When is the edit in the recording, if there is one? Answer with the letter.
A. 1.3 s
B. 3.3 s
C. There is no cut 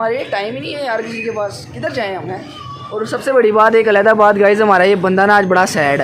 A